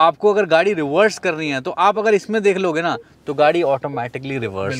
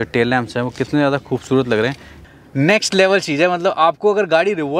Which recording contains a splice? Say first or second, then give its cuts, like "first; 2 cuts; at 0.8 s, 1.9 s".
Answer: second; 1 cut; at 2.2 s